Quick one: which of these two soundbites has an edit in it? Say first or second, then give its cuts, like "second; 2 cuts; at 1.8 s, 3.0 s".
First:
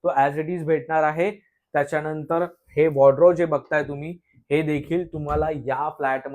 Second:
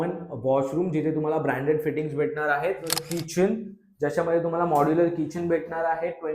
second; 1 cut; at 3.0 s